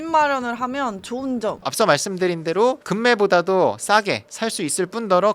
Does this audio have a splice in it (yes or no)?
no